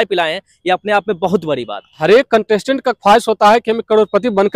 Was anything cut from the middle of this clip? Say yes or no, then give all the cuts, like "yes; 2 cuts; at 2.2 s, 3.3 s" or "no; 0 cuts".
yes; 1 cut; at 1.9 s